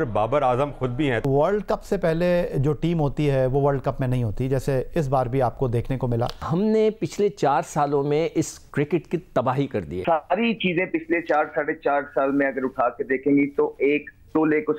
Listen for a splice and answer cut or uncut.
cut